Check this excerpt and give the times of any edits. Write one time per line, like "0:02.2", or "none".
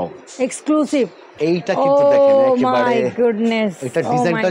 0:01.2